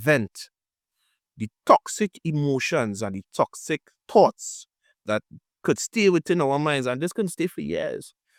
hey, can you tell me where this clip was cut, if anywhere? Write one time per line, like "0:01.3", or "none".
none